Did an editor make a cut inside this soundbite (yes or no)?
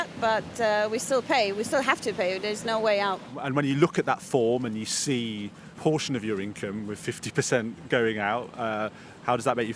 no